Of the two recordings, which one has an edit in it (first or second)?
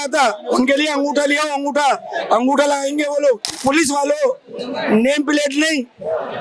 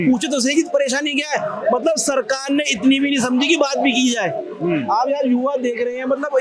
first